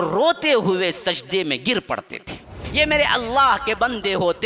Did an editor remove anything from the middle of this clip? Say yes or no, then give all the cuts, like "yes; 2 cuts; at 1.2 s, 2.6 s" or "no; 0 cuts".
yes; 1 cut; at 2.6 s